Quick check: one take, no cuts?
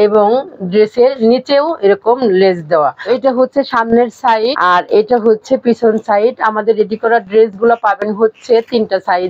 no; 2 cuts; at 3.1 s, 4.6 s

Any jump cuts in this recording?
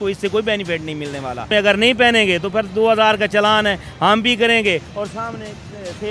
yes; 1 cut; at 1.5 s

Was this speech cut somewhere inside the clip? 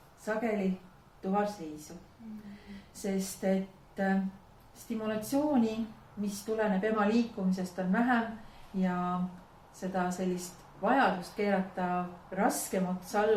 no; 0 cuts

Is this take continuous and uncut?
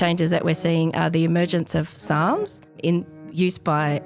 no; 1 cut; at 2.8 s

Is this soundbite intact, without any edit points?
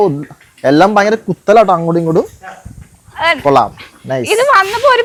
yes; 0 cuts

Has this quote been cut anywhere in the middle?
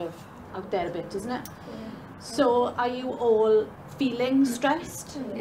yes; 1 cut; at 3.7 s

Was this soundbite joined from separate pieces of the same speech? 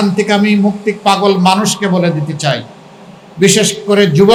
no; 0 cuts

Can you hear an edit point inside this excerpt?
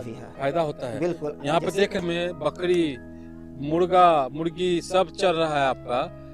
yes; 1 cut; at 2.0 s

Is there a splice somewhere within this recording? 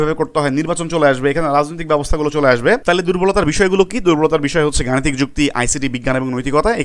yes; 1 cut; at 2.8 s

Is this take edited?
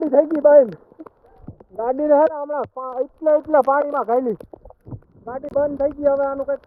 no; 0 cuts

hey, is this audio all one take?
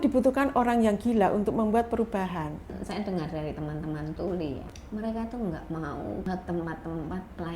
no; 3 cuts; at 2.7 s, 4.7 s, 6.3 s

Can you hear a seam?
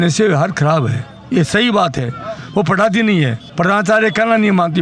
no; 0 cuts

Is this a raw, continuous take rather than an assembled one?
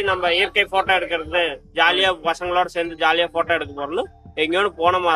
yes; 0 cuts

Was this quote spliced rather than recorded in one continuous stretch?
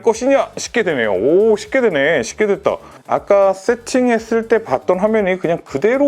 no; 0 cuts

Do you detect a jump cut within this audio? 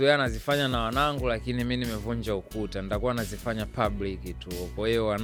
no; 0 cuts

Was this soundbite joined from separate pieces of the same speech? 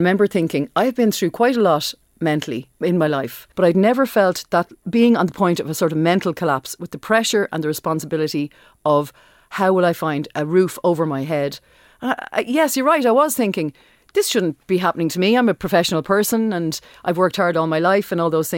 yes; 4 cuts; at 2.6 s, 3.4 s, 4.8 s, 10.2 s

